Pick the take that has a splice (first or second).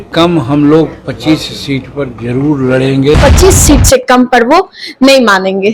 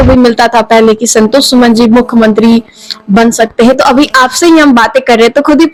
first